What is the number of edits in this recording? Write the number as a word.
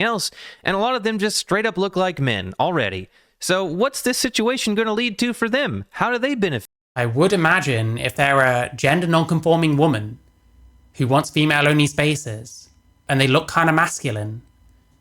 zero